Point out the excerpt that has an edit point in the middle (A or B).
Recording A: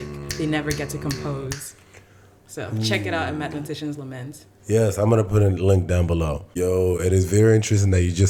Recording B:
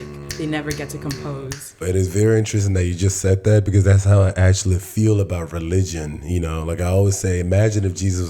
B